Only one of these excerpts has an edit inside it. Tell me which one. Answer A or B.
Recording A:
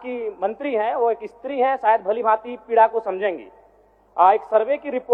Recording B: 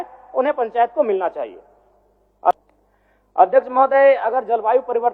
B